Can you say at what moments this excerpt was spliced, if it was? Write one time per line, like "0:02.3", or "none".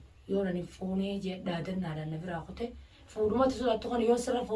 0:03.0